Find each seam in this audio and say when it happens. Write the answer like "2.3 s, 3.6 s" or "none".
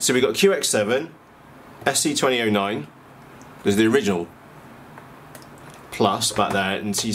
none